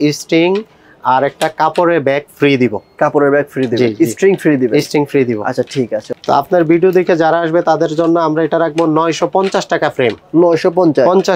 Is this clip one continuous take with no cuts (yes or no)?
no